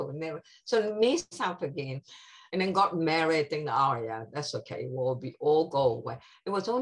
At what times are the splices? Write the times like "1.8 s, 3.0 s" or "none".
none